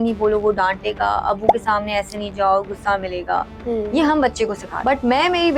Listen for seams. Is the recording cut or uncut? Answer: cut